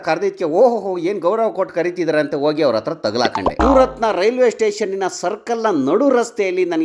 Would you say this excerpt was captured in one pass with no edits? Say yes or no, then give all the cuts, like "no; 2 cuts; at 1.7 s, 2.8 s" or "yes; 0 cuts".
no; 1 cut; at 3.5 s